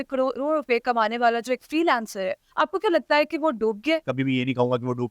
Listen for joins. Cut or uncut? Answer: cut